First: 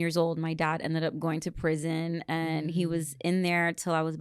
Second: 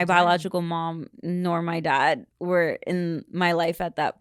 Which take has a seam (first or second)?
second